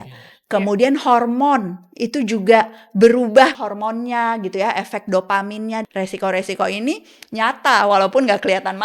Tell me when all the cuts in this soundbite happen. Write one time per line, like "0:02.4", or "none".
0:03.5
0:05.8